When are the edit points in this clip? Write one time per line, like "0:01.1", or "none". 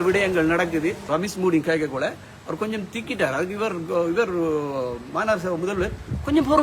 0:01.0